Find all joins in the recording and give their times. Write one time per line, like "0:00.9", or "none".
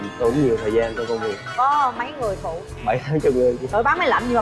0:01.4
0:02.7
0:03.7